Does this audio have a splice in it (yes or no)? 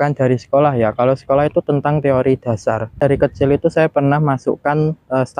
yes